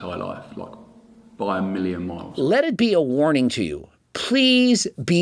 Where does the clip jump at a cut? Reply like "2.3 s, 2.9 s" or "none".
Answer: 2.3 s